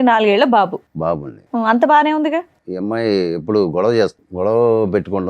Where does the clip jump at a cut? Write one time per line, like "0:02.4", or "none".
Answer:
0:02.6
0:04.2